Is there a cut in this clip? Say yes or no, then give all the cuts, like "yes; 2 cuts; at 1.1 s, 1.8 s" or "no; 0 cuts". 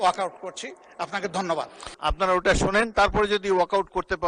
yes; 1 cut; at 1.9 s